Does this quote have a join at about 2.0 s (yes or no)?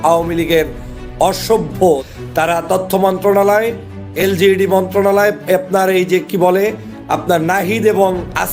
yes